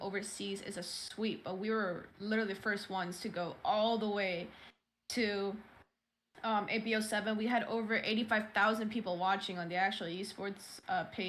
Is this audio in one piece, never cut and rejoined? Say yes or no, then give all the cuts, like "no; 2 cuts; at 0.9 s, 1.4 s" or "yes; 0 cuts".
yes; 0 cuts